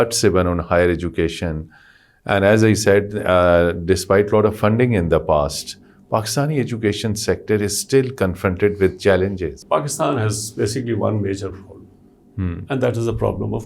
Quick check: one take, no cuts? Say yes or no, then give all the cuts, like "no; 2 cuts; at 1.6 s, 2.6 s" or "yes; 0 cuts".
no; 1 cut; at 9.5 s